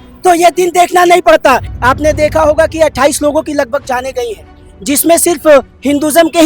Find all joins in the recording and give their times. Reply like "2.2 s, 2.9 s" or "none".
1.7 s